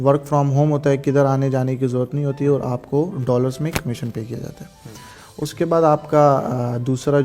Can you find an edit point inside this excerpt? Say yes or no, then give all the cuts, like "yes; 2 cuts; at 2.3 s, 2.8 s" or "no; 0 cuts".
no; 0 cuts